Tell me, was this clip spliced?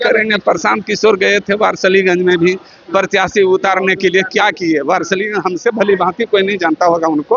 no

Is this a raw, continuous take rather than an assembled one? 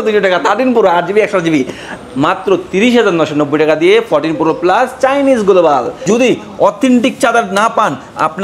no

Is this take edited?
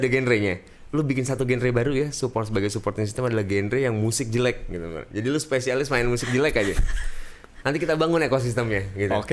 no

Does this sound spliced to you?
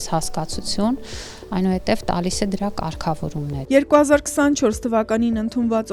no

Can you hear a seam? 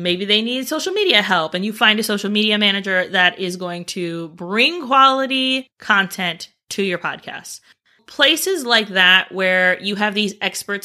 yes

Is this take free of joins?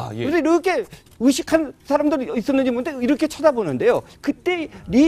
yes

